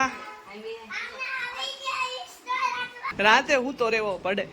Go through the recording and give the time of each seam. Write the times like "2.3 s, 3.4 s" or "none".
3.1 s